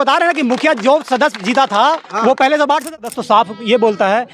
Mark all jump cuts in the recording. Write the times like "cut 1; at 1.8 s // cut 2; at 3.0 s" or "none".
cut 1; at 3.0 s